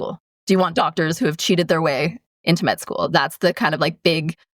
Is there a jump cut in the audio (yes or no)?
yes